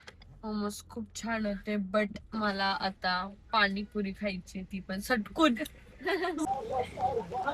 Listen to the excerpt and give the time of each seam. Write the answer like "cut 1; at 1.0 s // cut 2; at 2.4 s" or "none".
cut 1; at 6.5 s